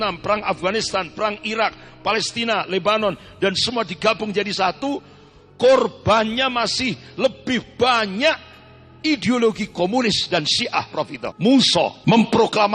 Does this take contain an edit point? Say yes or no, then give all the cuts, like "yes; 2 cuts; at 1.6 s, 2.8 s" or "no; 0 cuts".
yes; 2 cuts; at 11.2 s, 12.0 s